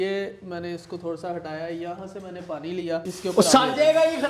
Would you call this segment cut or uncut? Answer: cut